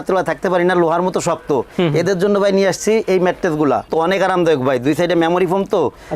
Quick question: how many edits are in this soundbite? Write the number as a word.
one